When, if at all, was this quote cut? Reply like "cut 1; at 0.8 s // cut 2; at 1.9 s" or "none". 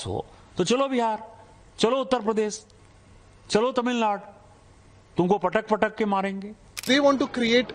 cut 1; at 6.8 s